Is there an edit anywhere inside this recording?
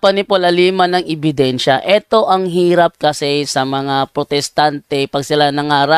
no; 0 cuts

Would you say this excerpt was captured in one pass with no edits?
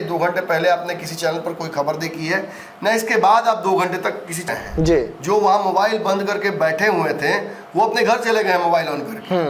no; 1 cut; at 4.4 s

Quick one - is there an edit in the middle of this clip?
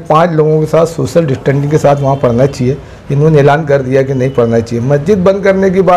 no; 0 cuts

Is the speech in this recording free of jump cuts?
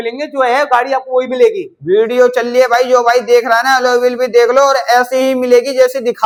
yes; 0 cuts

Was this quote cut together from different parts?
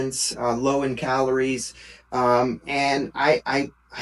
no; 0 cuts

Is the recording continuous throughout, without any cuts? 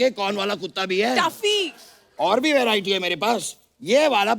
yes; 0 cuts

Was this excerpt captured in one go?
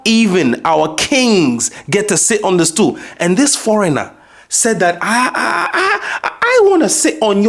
yes; 0 cuts

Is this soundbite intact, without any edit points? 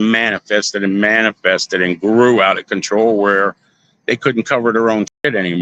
yes; 0 cuts

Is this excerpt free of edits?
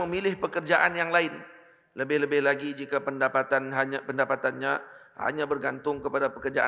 yes; 0 cuts

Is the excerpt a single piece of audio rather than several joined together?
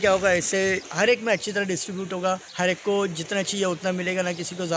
yes; 0 cuts

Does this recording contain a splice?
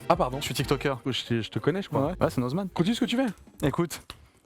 yes; 2 cuts; at 1.0 s, 2.7 s

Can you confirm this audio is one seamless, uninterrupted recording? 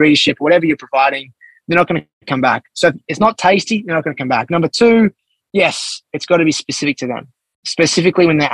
yes; 0 cuts

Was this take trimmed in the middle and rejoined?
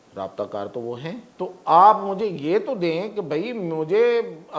yes; 1 cut; at 1.3 s

